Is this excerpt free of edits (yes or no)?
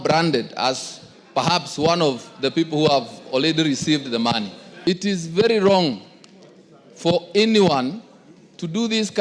no